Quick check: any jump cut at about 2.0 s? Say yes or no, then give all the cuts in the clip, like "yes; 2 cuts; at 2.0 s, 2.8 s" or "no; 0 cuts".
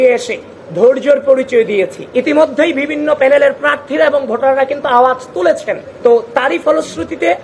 yes; 1 cut; at 2.0 s